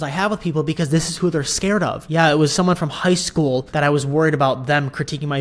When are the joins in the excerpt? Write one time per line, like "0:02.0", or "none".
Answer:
0:02.0
0:03.7